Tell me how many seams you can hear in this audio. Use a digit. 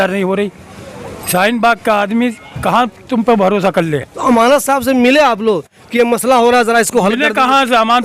0